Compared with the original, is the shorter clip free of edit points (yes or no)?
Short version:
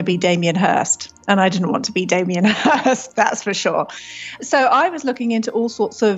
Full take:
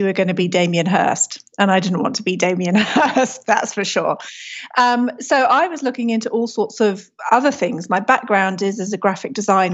no